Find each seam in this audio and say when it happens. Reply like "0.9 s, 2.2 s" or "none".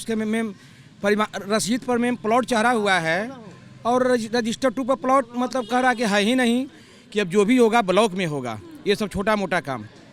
6.8 s